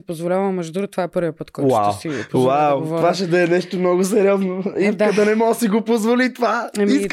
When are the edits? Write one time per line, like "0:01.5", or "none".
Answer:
none